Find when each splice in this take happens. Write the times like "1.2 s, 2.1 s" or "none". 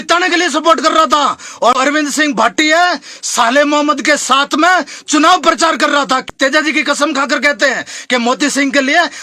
1.9 s, 5.9 s